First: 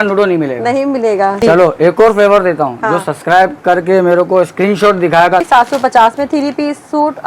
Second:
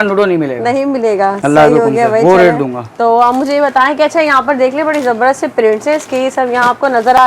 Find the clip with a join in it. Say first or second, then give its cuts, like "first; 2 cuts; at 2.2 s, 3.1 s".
first; 2 cuts; at 1.4 s, 5.5 s